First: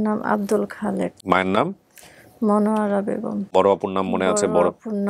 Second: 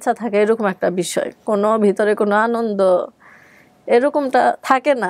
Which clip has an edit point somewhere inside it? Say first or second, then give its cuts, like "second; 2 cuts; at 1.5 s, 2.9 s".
first; 2 cuts; at 1.2 s, 3.5 s